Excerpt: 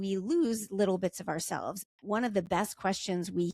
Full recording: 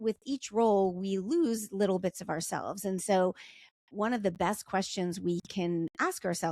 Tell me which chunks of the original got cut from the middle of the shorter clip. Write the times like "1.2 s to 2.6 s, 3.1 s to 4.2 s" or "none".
2.7 s to 3.6 s

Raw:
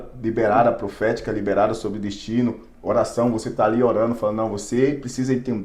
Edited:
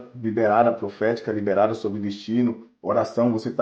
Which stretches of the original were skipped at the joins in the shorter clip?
none

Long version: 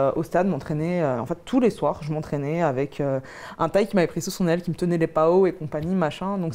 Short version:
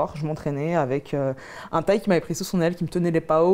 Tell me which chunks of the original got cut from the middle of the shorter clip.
none

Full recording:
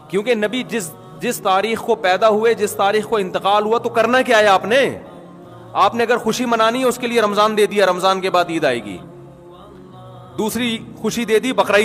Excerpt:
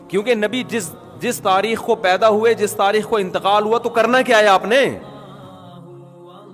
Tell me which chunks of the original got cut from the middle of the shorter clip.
5.6 s to 8.9 s

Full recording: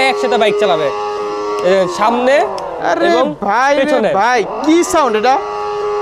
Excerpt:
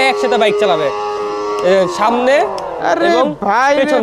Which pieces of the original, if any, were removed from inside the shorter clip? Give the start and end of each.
none

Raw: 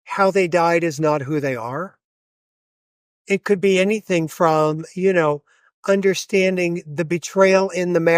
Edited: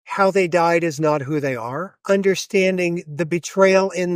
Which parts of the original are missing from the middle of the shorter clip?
1.9 s to 5.7 s

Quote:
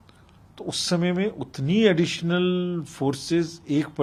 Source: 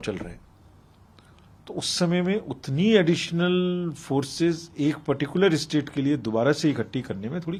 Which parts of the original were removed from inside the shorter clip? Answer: none

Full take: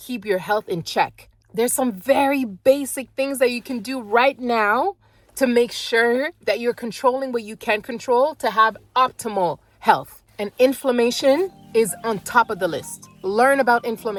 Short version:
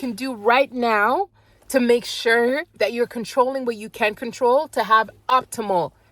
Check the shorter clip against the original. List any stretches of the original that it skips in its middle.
none

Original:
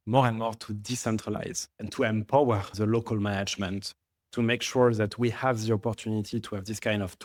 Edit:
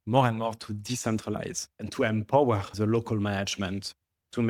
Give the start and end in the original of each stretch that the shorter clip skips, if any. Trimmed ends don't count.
none

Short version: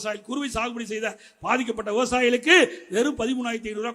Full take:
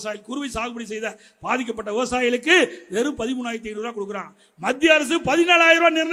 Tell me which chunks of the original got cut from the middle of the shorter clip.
none

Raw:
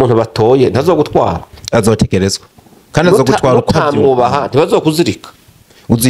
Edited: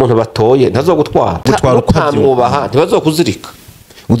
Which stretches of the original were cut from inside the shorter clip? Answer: 1.5 s to 3.3 s

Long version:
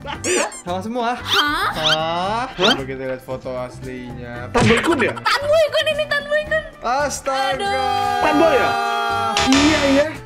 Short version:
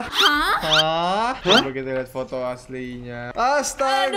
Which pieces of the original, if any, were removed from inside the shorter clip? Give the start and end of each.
4.4 s to 6.7 s

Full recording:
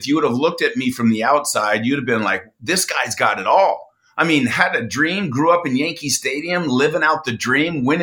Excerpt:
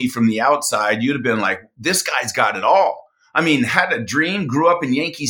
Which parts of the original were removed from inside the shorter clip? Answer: none

